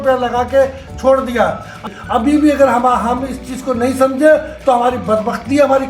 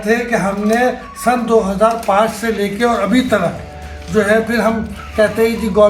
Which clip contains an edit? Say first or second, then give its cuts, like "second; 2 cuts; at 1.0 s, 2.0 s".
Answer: first; 1 cut; at 1.8 s